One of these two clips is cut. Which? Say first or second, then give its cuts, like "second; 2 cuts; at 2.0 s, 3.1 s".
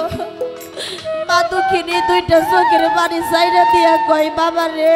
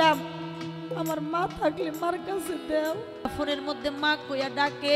second; 1 cut; at 3.3 s